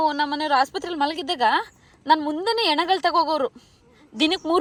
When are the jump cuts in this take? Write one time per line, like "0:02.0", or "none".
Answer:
none

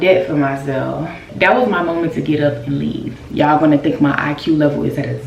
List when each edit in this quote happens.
0:01.2
0:03.0

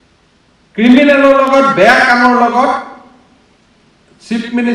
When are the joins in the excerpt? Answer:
none

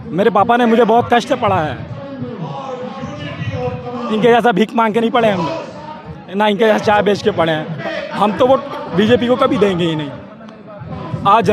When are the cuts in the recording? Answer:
0:07.7

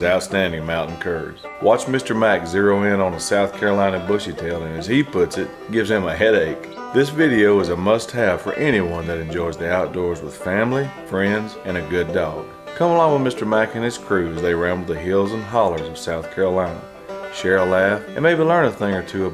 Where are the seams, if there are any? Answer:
none

